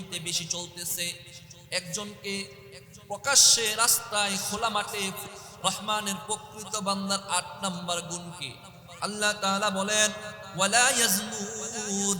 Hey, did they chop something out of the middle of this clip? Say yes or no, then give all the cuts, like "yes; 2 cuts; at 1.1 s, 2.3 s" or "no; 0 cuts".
yes; 1 cut; at 5.4 s